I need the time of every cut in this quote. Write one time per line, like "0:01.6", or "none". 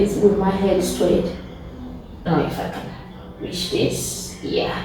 0:02.3